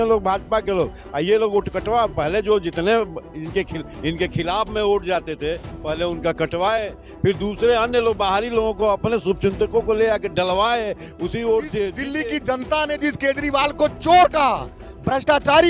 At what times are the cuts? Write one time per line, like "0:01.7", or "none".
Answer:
0:12.0